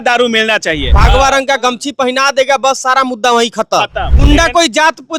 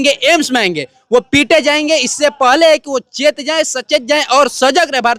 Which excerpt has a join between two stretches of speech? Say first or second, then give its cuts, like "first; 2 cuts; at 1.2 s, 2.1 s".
first; 2 cuts; at 1.0 s, 4.1 s